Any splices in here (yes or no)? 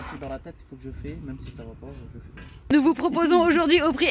yes